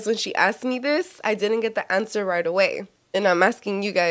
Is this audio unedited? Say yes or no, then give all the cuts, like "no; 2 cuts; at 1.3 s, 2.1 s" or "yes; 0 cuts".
no; 1 cut; at 2.9 s